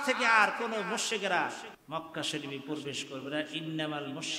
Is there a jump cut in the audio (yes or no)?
yes